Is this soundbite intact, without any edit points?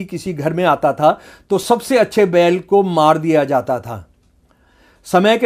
yes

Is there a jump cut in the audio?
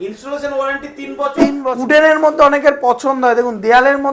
yes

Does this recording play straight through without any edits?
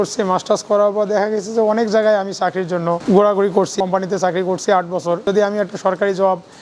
no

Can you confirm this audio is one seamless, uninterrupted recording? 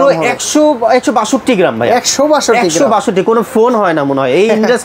yes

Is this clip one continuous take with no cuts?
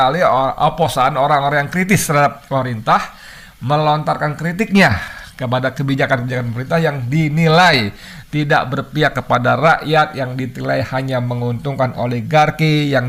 yes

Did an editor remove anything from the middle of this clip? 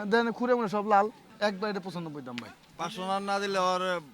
yes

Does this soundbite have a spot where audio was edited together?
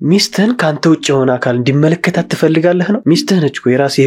yes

